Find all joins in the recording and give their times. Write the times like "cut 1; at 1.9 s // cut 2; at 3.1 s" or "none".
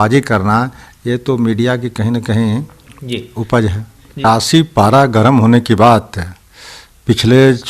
cut 1; at 4.2 s